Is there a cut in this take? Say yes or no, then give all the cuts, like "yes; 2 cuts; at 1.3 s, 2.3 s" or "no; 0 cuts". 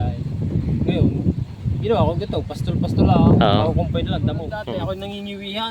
yes; 1 cut; at 4.7 s